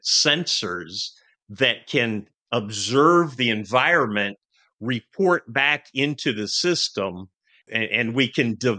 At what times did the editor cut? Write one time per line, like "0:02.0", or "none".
0:07.6